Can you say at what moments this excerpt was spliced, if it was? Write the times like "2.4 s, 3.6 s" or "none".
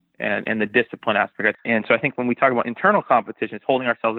1.5 s